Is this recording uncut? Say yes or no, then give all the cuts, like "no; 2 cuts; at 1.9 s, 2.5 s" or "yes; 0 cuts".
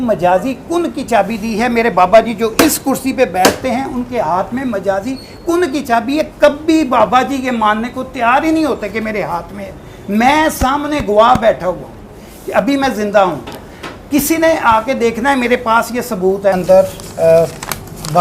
no; 1 cut; at 16.5 s